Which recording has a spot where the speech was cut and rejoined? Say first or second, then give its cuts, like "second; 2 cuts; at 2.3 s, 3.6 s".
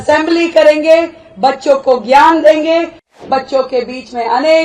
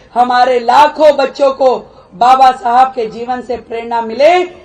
first; 1 cut; at 3.2 s